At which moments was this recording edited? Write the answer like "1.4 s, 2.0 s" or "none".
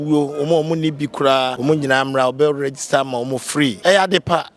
1.5 s, 3.8 s